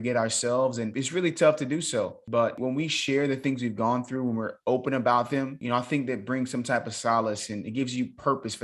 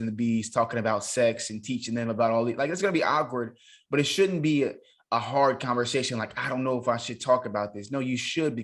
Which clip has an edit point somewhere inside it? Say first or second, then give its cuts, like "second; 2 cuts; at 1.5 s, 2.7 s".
first; 3 cuts; at 0.9 s, 2.6 s, 5.6 s